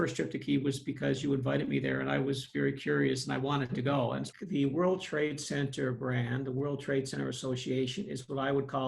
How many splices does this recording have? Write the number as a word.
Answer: one